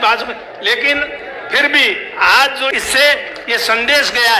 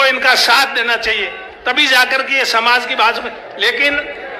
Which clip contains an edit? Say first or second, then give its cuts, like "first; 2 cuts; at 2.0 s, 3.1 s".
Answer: first; 1 cut; at 2.7 s